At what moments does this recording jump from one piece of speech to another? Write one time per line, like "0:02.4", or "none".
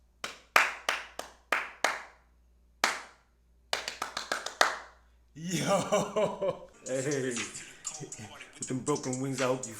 0:06.7